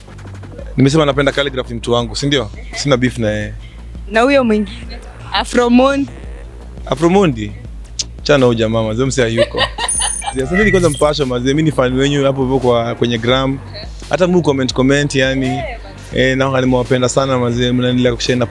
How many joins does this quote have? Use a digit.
1